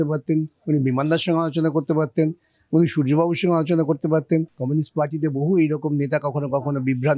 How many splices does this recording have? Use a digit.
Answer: 1